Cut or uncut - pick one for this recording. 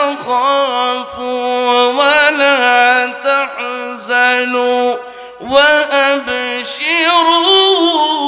uncut